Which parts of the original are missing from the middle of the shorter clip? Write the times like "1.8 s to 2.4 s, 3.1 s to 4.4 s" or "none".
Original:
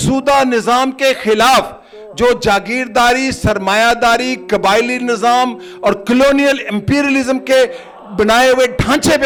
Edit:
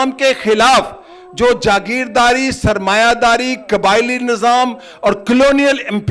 none